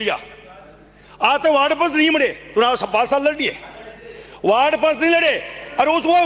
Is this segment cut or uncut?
uncut